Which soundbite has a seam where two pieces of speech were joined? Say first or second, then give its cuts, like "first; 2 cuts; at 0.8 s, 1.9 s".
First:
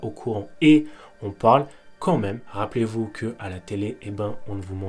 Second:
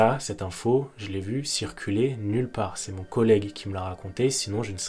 first; 1 cut; at 2.4 s